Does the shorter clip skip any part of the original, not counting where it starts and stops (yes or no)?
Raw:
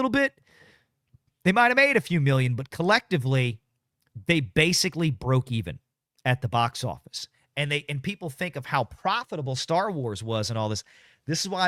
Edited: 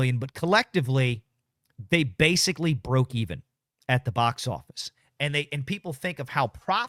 no